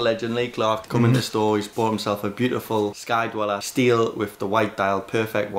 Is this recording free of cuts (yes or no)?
yes